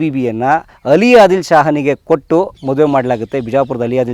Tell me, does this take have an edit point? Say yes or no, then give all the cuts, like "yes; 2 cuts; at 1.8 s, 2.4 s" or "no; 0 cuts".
no; 0 cuts